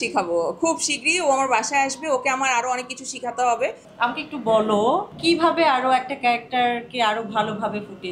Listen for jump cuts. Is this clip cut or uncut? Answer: cut